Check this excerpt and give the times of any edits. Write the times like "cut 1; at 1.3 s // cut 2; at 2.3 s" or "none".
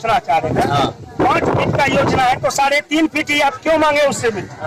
none

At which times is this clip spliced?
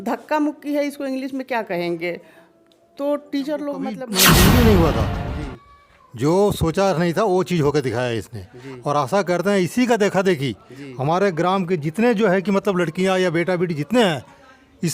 cut 1; at 4.0 s

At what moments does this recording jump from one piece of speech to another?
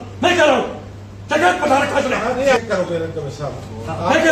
cut 1; at 2.6 s

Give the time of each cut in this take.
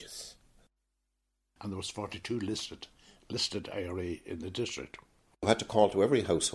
cut 1; at 1.1 s // cut 2; at 5.5 s

